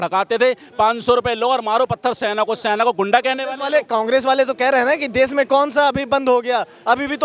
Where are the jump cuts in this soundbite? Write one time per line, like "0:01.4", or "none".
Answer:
none